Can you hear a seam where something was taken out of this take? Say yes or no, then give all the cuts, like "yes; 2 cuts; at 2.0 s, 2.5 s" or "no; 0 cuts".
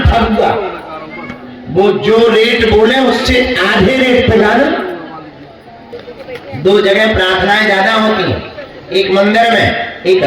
yes; 1 cut; at 5.9 s